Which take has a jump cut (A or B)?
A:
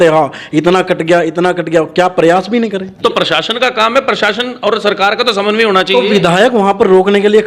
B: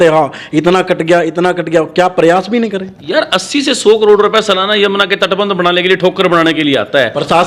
A